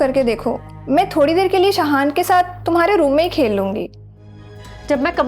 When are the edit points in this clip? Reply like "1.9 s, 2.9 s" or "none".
4.1 s